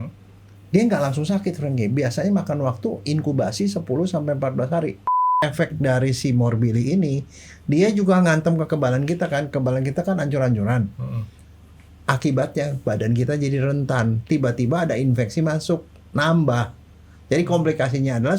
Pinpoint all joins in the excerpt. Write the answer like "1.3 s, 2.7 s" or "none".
5.4 s